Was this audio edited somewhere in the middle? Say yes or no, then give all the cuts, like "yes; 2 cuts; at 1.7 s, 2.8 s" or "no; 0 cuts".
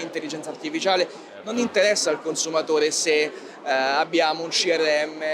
yes; 1 cut; at 1.4 s